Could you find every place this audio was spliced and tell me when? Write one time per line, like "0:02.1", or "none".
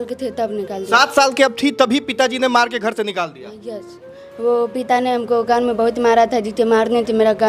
0:04.0